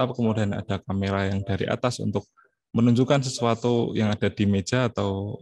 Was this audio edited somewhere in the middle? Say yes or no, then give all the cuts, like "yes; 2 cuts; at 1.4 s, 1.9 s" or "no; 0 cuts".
no; 0 cuts